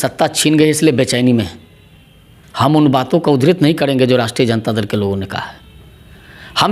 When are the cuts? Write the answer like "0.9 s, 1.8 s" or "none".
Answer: none